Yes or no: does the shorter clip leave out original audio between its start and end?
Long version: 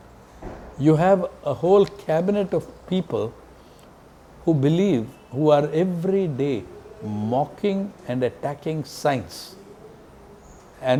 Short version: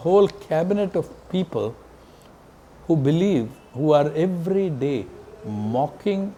no